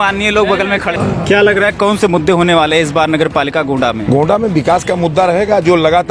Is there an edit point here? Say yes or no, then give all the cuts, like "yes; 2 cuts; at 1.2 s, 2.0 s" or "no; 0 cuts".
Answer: yes; 2 cuts; at 0.9 s, 4.0 s